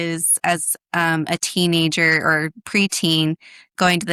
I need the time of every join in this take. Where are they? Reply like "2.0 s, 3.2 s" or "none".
none